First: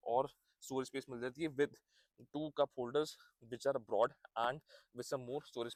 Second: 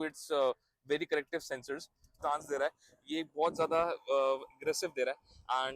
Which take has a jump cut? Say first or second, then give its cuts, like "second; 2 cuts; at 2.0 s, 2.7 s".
second; 1 cut; at 2.1 s